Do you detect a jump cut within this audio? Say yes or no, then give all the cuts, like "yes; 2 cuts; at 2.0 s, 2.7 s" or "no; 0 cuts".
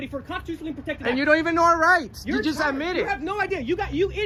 no; 0 cuts